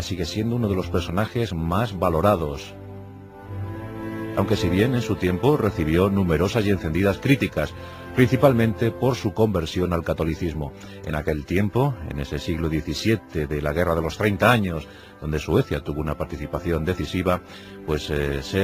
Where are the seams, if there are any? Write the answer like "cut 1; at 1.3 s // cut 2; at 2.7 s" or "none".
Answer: cut 1; at 3.3 s

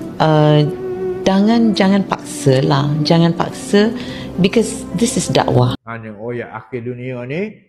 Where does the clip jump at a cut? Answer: cut 1; at 5.8 s

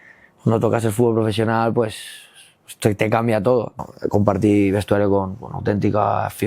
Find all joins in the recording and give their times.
cut 1; at 3.9 s

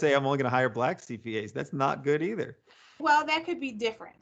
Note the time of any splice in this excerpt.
cut 1; at 3.0 s

